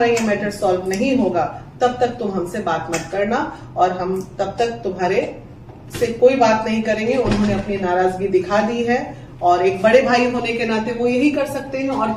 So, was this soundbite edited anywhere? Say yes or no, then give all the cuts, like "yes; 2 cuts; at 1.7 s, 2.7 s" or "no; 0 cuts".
no; 0 cuts